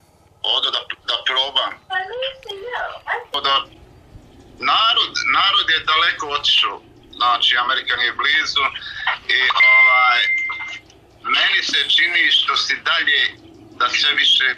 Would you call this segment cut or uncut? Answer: cut